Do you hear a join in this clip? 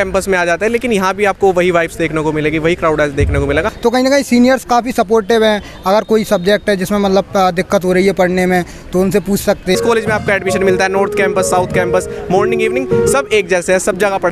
yes; 2 cuts; at 3.7 s, 9.8 s

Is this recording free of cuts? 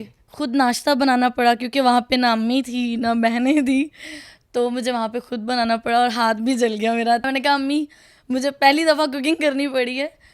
no; 1 cut; at 7.3 s

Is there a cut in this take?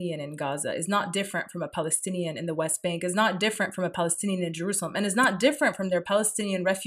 no; 0 cuts

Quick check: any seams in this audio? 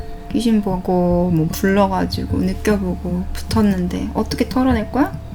no; 0 cuts

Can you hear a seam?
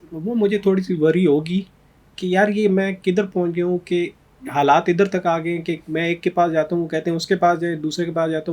no; 0 cuts

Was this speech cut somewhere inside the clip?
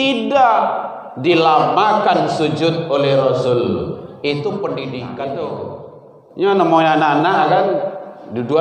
yes; 1 cut; at 5.4 s

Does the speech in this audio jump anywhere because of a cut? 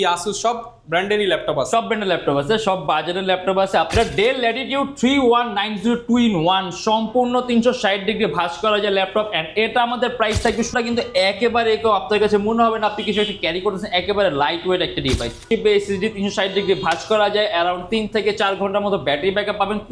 yes; 3 cuts; at 3.9 s, 10.7 s, 15.5 s

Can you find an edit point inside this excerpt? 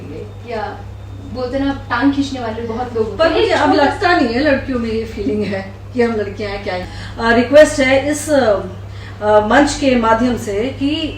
yes; 1 cut; at 6.8 s

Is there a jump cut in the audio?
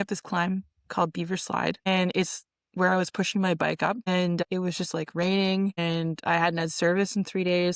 yes; 3 cuts; at 1.9 s, 4.5 s, 5.8 s

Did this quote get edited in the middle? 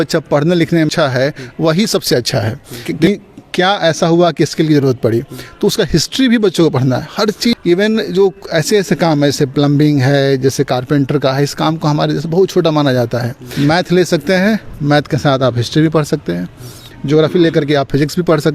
yes; 4 cuts; at 0.9 s, 2.9 s, 7.6 s, 13.4 s

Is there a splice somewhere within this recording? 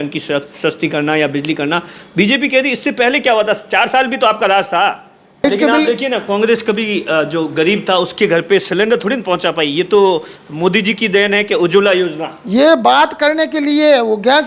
yes; 1 cut; at 5.5 s

